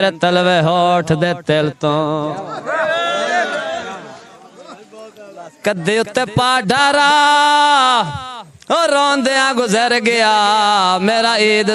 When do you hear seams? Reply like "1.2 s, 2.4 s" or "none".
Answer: none